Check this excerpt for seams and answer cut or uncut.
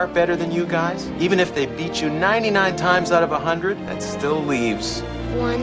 cut